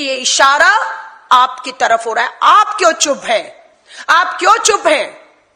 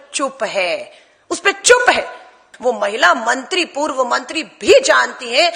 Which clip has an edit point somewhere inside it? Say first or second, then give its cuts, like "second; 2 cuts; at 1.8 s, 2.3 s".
second; 1 cut; at 2.4 s